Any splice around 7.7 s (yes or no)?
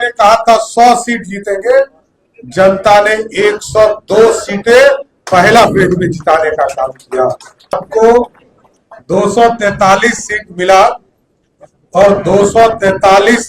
yes